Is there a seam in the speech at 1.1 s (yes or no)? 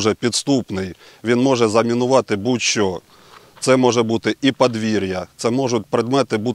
no